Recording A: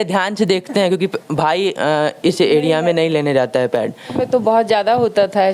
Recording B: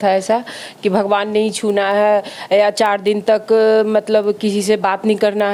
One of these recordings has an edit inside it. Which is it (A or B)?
A